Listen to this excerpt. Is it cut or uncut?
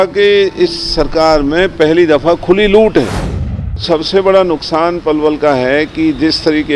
cut